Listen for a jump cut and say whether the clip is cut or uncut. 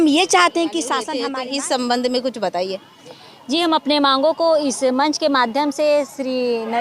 cut